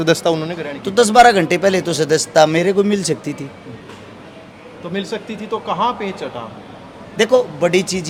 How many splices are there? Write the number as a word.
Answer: zero